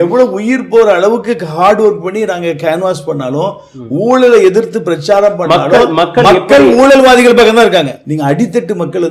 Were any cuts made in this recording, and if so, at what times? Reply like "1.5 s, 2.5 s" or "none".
8.0 s